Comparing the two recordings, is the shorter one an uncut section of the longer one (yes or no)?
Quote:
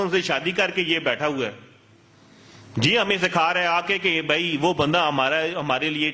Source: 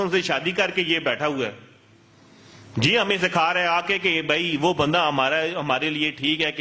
yes